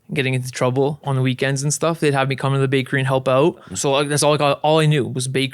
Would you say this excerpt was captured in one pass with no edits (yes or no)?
no